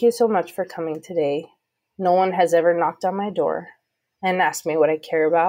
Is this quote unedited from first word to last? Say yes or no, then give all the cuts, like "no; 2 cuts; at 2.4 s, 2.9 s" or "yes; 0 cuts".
yes; 0 cuts